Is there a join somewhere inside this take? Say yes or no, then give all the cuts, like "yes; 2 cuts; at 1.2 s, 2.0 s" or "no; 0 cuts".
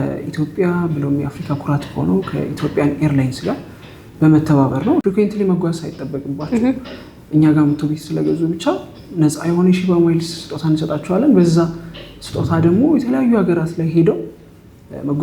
yes; 1 cut; at 5.0 s